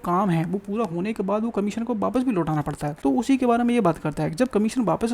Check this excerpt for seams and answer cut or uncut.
cut